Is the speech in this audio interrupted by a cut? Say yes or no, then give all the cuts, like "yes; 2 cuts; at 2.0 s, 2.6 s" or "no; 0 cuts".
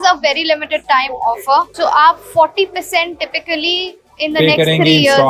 no; 0 cuts